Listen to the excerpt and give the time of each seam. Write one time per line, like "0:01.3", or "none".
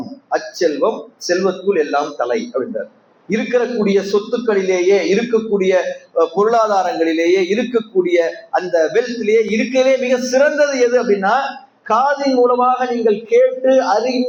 none